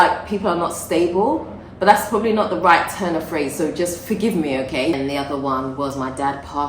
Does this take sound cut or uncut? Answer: cut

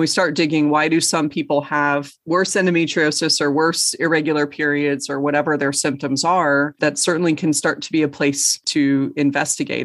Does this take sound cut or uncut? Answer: cut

